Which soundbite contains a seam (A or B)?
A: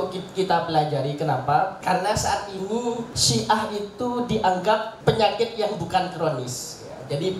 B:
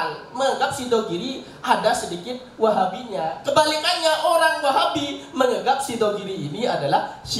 A